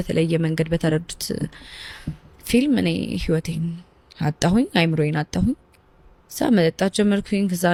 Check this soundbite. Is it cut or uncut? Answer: uncut